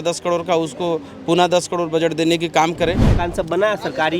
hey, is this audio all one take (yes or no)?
no